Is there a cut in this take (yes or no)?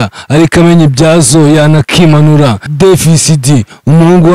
yes